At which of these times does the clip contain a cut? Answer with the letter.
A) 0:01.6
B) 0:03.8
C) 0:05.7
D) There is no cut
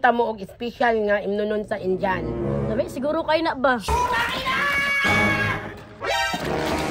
B